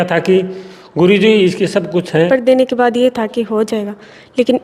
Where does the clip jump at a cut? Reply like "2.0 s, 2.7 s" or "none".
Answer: 2.3 s